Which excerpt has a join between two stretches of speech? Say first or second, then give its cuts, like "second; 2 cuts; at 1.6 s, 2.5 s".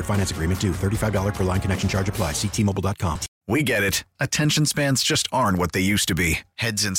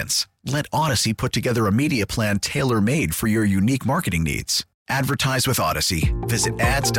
first; 1 cut; at 3.3 s